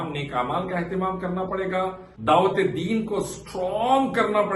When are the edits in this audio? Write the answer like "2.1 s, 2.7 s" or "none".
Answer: 2.1 s

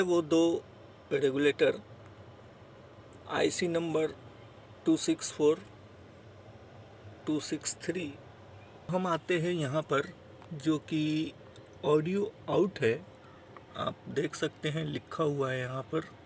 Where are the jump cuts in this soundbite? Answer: 8.9 s

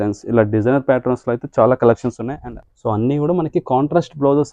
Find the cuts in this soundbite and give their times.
2.3 s

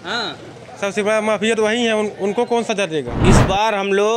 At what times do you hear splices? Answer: 3.1 s

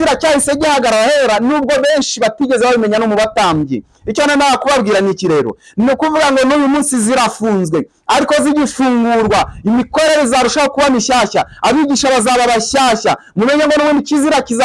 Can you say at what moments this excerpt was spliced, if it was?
none

